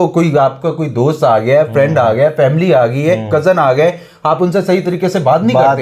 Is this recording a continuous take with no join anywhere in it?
yes; 0 cuts

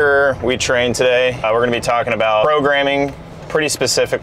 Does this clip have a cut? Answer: yes; 2 cuts; at 1.4 s, 2.4 s

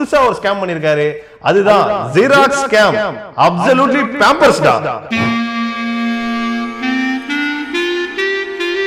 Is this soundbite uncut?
yes; 0 cuts

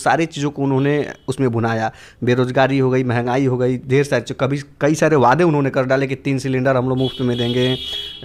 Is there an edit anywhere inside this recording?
no; 0 cuts

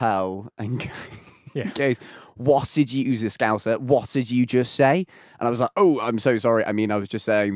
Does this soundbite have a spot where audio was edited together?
no; 0 cuts

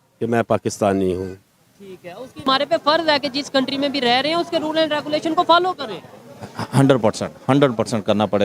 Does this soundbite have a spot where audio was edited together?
yes; 1 cut; at 2.5 s

